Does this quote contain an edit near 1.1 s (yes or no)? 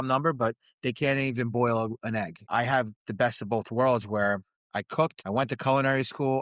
no